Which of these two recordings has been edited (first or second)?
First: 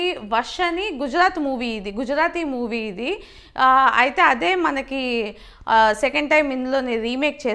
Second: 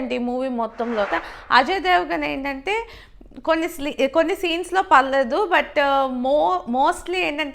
second